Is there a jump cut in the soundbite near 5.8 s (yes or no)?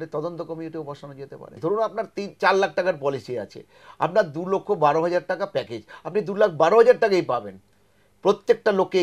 no